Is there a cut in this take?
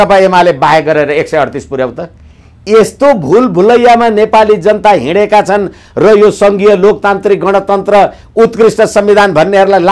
no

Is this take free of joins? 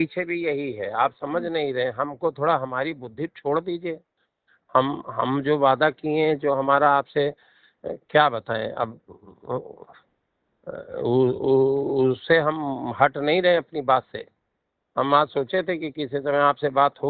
yes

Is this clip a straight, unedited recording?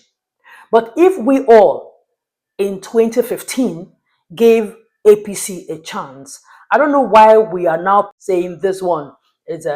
no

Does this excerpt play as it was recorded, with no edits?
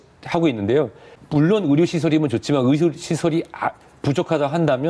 no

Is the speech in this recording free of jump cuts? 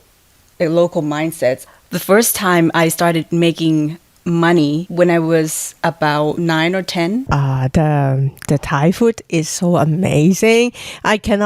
no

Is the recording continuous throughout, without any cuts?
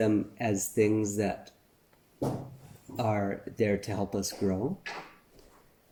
yes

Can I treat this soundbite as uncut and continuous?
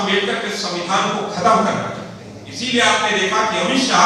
yes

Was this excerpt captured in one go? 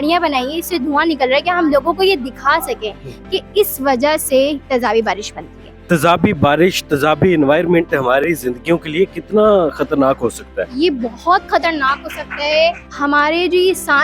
no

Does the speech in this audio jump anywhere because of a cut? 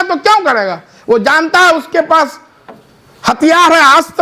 no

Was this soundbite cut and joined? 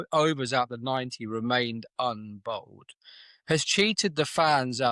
no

